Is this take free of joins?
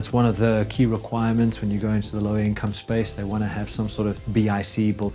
no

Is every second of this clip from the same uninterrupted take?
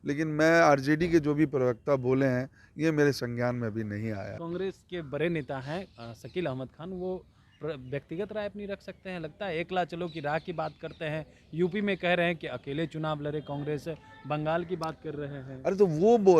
no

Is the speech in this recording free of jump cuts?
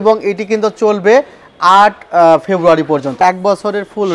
no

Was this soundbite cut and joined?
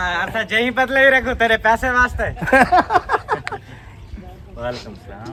no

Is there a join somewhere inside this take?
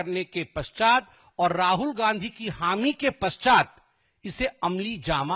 no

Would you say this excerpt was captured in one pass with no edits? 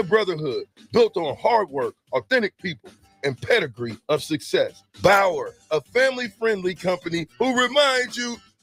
yes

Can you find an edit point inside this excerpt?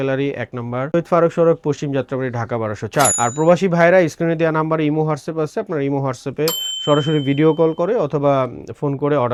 no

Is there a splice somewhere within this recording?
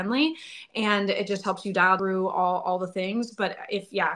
yes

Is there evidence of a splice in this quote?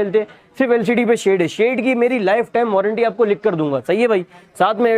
no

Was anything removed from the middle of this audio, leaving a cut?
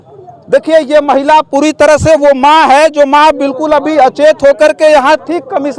no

